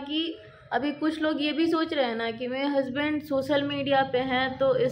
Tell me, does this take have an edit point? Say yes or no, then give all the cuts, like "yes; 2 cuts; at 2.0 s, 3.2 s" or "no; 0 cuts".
no; 0 cuts